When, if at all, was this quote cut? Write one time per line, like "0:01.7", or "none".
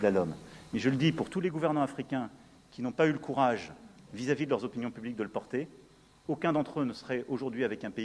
0:02.0